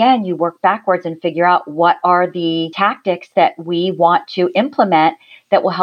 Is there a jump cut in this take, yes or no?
yes